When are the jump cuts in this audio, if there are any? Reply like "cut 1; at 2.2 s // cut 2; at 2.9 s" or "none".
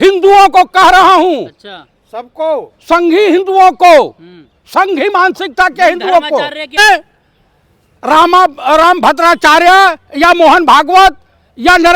cut 1; at 6.8 s